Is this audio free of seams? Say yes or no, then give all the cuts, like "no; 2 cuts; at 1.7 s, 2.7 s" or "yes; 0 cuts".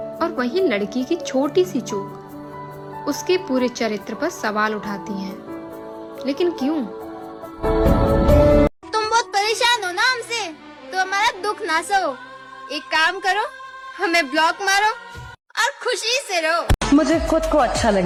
yes; 0 cuts